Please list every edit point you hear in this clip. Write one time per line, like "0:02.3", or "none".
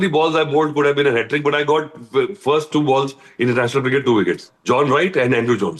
0:04.5